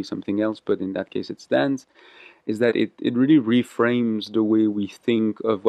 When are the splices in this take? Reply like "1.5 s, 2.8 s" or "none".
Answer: none